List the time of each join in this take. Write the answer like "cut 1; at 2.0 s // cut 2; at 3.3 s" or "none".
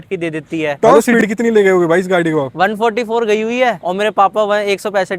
cut 1; at 0.8 s // cut 2; at 2.5 s // cut 3; at 3.8 s